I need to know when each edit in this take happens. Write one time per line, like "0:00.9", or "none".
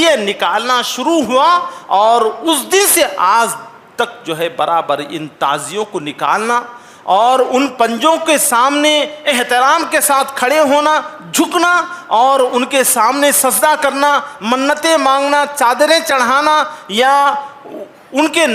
none